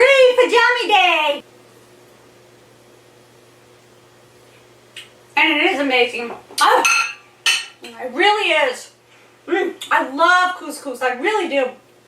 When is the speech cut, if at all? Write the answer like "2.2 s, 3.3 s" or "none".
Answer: 1.5 s